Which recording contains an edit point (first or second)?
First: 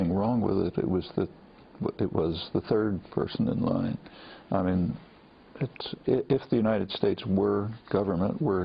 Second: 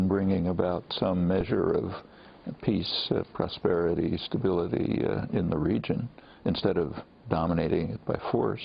first